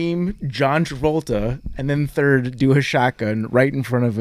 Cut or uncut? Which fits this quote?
uncut